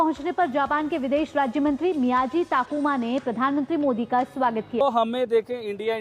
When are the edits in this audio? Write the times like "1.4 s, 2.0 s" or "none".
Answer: 4.8 s